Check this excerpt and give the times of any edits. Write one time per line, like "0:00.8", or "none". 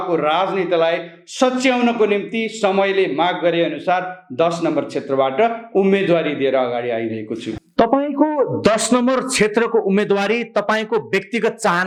none